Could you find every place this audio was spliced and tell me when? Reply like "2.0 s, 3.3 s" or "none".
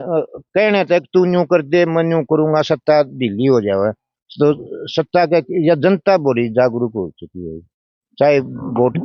none